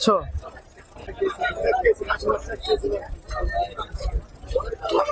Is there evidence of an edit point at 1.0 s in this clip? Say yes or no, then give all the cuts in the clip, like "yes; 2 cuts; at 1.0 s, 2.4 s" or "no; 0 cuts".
yes; 1 cut; at 1.0 s